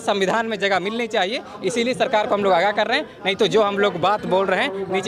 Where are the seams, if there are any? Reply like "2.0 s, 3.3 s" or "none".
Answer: none